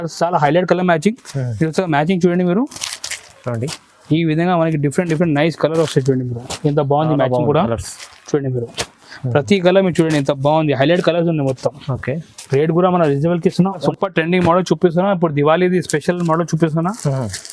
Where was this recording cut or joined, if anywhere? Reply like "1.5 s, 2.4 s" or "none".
13.8 s

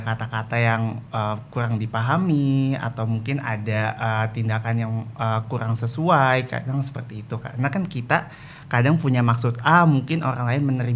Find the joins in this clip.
none

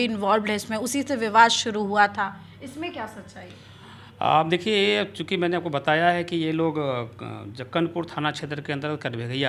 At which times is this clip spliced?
none

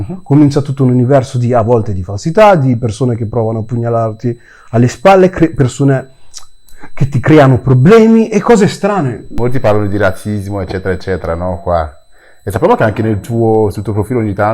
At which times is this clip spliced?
9.4 s

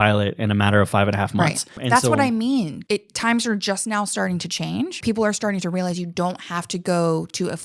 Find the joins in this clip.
1.8 s, 2.8 s, 5.0 s

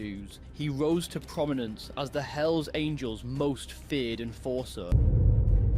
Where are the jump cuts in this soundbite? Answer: 4.9 s

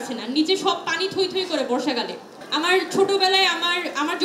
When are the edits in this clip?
2.4 s

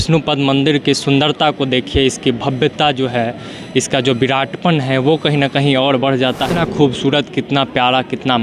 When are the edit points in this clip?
6.5 s

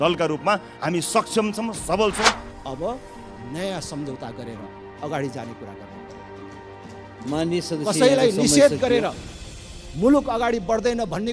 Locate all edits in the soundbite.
2.4 s

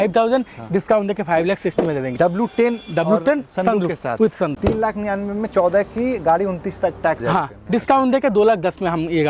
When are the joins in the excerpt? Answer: 2.1 s, 4.5 s, 7.2 s

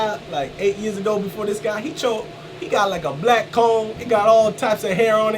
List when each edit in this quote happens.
4.0 s

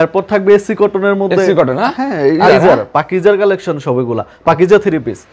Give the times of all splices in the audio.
2.5 s

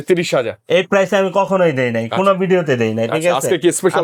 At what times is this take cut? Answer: none

